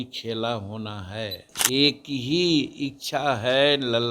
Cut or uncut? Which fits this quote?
cut